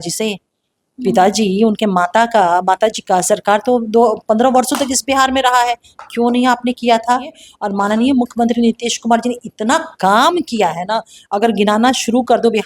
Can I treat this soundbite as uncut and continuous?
no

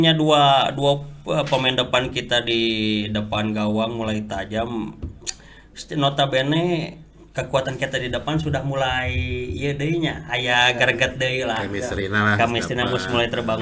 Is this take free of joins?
yes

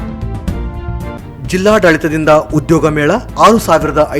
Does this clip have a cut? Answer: no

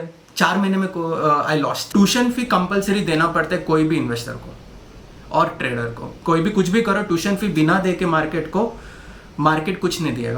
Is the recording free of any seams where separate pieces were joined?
no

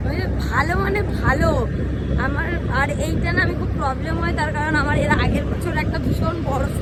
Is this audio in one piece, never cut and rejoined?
yes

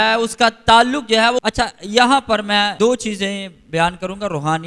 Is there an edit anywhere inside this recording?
yes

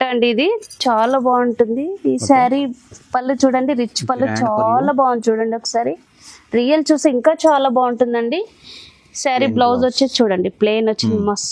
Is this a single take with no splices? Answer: yes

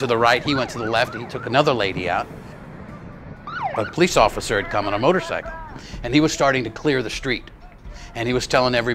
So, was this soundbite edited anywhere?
no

